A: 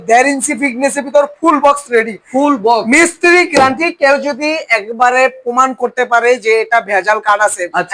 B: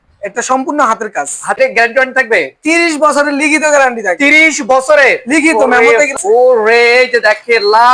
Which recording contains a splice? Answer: B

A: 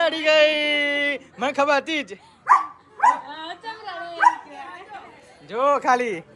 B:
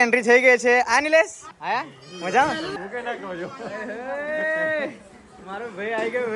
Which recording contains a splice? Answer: B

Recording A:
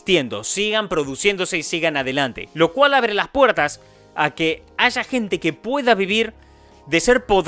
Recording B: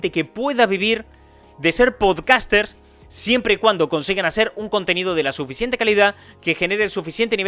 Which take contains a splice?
A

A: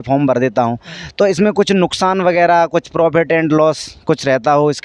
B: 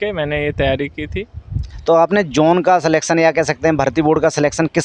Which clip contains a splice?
B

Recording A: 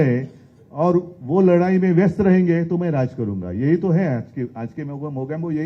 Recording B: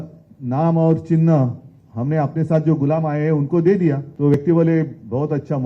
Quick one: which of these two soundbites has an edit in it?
B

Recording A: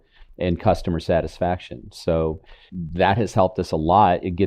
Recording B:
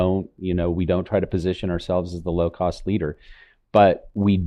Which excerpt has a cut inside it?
A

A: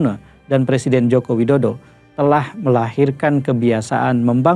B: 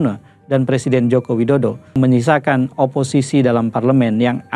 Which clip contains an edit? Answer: B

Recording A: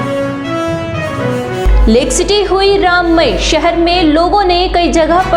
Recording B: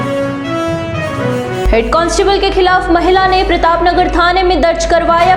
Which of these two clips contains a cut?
A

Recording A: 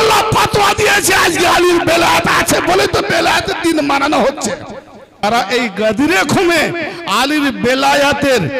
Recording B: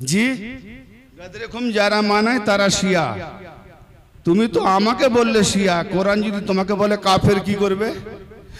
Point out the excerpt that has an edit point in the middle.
A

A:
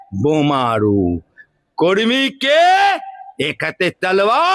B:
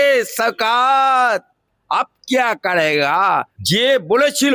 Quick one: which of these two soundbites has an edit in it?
B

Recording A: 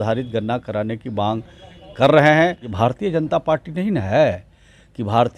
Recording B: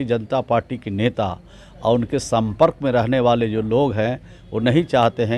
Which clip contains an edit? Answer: A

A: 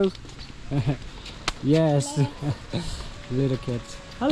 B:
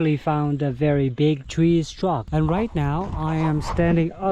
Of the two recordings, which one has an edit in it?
B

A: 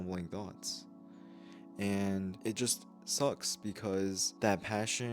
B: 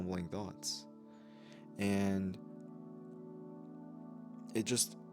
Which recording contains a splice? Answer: A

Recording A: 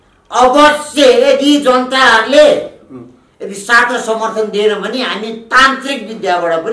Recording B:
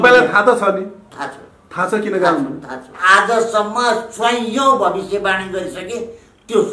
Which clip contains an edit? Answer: B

